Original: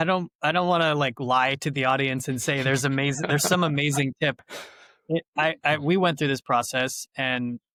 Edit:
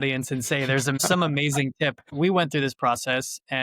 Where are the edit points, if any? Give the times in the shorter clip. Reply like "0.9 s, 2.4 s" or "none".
1.0 s, 2.1 s